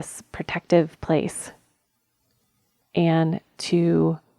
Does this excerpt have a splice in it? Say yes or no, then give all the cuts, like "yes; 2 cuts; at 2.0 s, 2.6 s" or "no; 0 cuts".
yes; 1 cut; at 2.8 s